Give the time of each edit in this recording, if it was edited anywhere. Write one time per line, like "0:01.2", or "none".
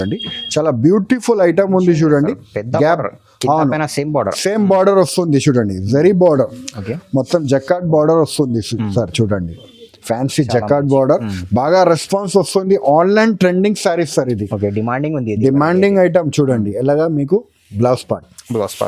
none